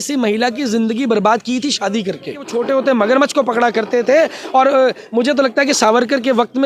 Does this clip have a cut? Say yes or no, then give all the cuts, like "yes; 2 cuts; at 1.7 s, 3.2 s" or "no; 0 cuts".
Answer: yes; 1 cut; at 2.5 s